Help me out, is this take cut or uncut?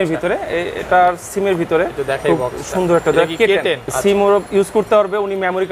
cut